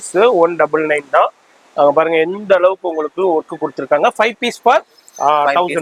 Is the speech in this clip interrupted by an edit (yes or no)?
no